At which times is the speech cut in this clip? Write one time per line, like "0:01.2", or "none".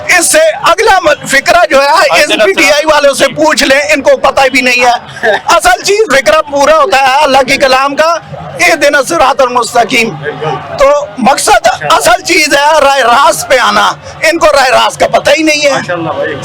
none